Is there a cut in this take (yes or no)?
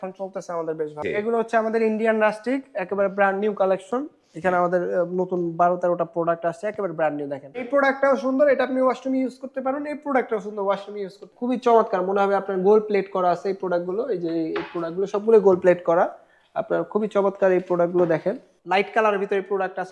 yes